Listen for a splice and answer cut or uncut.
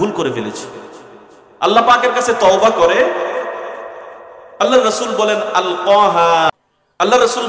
cut